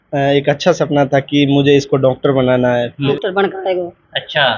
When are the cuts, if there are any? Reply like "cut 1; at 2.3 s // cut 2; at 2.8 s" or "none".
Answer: cut 1; at 3.1 s